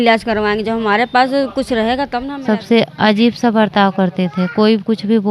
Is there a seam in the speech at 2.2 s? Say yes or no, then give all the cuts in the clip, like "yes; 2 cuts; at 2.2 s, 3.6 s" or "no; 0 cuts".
yes; 1 cut; at 2.2 s